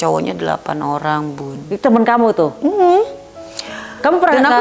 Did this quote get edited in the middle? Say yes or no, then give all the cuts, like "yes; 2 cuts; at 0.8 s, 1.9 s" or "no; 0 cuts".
no; 0 cuts